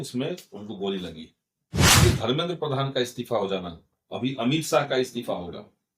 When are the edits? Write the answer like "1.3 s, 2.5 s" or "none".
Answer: 1.9 s